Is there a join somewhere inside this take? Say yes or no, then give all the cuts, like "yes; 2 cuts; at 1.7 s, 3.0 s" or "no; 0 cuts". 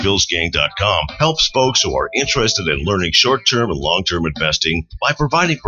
no; 0 cuts